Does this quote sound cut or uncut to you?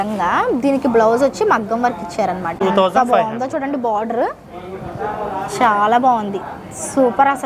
cut